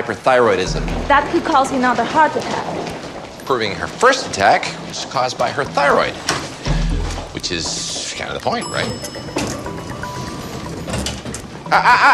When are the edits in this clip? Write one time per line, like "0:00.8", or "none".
none